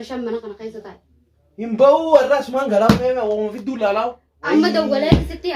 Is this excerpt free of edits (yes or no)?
no